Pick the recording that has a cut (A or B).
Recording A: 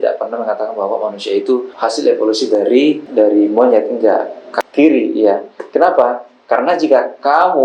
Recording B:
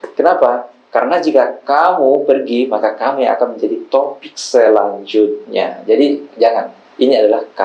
A